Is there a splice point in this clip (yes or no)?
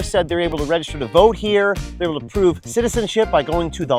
no